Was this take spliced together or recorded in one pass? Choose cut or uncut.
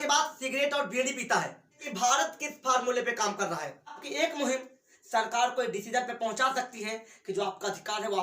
cut